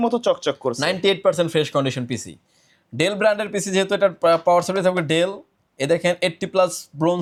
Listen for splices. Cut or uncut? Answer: uncut